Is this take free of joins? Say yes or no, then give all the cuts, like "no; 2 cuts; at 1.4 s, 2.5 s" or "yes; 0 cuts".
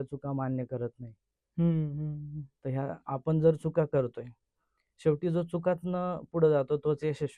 yes; 0 cuts